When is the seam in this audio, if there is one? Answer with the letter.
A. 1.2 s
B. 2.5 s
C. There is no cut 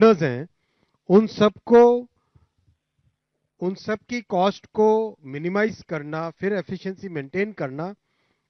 C